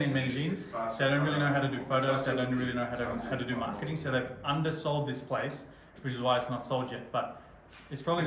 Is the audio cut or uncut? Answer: uncut